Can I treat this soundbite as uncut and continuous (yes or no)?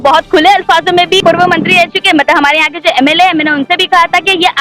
no